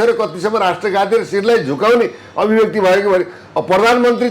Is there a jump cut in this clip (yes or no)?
no